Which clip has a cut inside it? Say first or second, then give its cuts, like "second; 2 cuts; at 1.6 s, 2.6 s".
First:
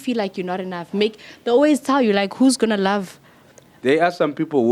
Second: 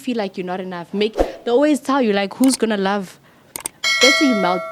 first; 1 cut; at 3.6 s